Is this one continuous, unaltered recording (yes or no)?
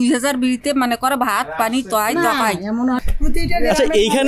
no